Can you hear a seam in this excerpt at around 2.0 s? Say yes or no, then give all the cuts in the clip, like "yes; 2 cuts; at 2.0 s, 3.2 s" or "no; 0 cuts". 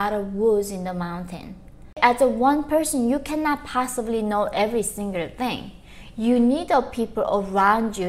yes; 1 cut; at 2.0 s